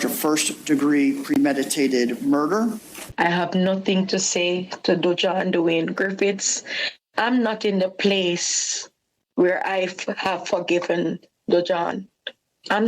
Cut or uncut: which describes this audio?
cut